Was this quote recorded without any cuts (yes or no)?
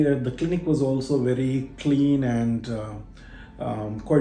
yes